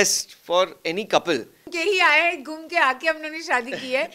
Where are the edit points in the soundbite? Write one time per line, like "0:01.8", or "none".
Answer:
0:01.7